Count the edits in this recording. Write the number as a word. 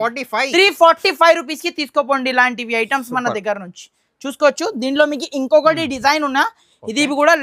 zero